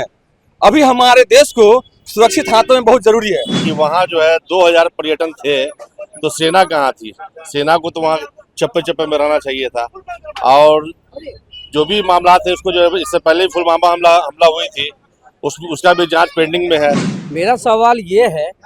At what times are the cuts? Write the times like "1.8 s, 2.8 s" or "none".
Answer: 3.6 s, 17.1 s